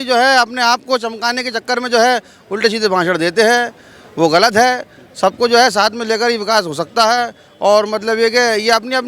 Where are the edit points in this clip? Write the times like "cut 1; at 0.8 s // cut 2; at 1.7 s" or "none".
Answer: none